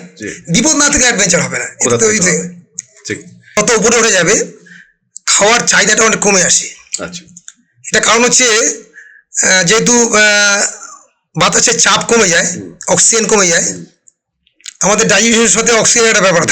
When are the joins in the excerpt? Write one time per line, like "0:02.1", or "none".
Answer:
0:03.6